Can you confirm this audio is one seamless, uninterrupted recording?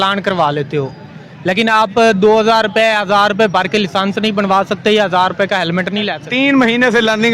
no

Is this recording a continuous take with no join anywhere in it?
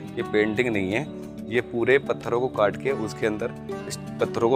yes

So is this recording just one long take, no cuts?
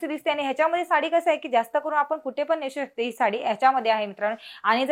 yes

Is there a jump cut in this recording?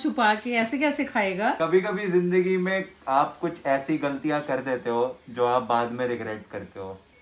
yes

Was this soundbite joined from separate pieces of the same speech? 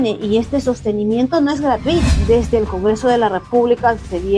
yes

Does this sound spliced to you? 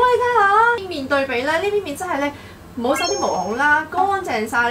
yes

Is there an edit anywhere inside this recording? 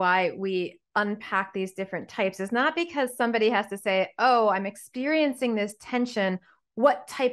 no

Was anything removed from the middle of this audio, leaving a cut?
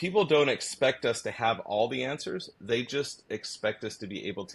no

